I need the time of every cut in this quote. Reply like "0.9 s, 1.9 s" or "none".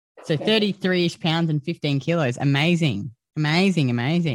none